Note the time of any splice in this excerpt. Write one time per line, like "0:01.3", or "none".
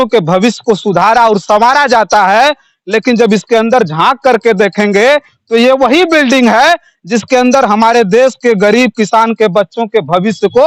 none